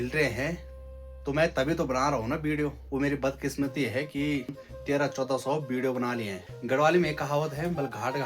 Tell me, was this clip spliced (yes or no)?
yes